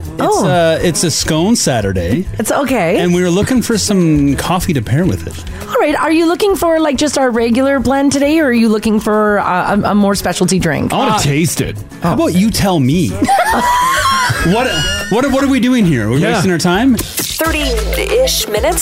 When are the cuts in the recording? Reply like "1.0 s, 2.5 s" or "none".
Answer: 17.0 s

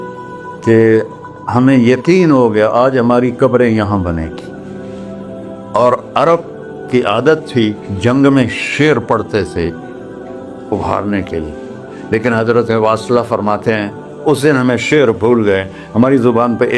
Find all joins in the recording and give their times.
none

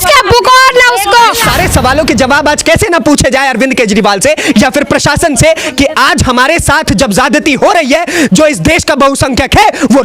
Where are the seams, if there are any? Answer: 1.5 s

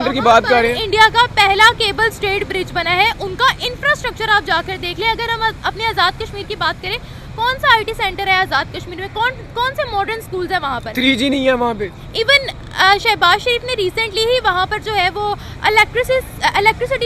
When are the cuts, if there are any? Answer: none

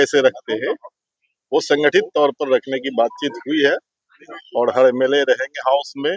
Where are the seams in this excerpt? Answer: none

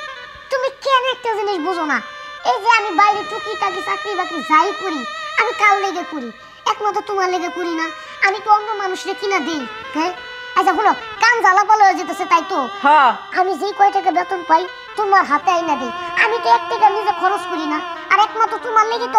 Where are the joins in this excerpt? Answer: none

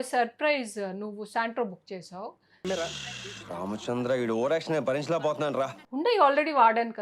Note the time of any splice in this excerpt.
5.8 s

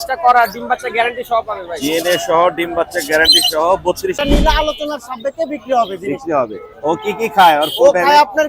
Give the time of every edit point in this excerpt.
4.2 s

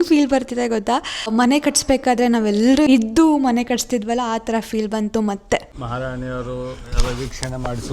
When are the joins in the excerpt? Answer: 1.3 s, 2.9 s, 5.8 s

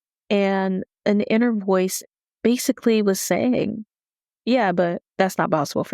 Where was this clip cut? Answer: 2.0 s

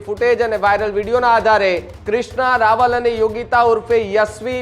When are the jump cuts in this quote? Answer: 1.9 s

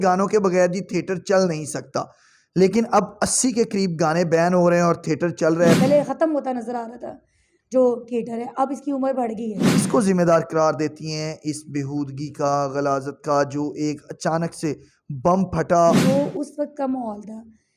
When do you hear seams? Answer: 5.8 s, 9.8 s, 16.0 s

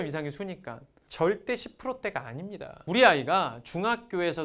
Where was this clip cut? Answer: 1.0 s, 2.7 s

